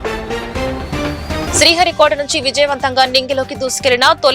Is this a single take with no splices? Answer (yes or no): yes